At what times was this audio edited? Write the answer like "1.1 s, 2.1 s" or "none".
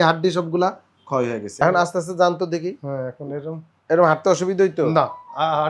1.5 s

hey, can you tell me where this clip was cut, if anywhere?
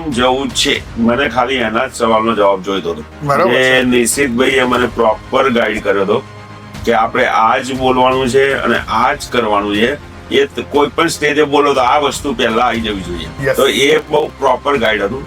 0.9 s, 3.1 s, 13.2 s

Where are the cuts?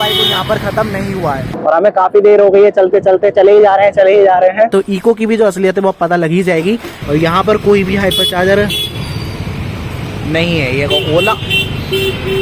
1.5 s, 4.7 s, 6.9 s

